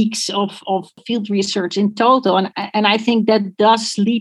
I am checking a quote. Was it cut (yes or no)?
yes